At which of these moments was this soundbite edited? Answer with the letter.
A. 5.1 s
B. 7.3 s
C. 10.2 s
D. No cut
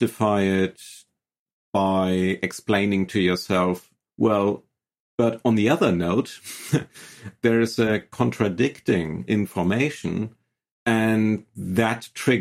B